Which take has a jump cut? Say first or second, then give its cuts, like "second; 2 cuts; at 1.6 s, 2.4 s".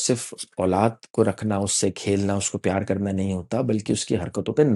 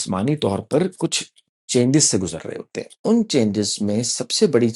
second; 1 cut; at 2.9 s